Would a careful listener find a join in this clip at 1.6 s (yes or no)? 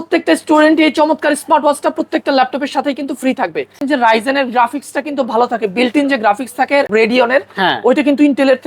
no